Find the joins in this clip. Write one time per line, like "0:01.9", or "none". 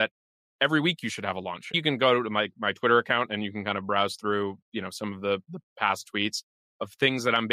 0:01.8